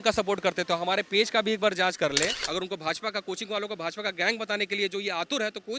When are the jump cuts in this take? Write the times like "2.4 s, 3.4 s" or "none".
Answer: 2.4 s